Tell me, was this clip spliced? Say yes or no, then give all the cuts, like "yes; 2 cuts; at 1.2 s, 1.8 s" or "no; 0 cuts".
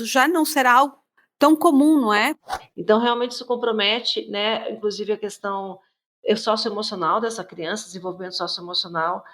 yes; 1 cut; at 2.4 s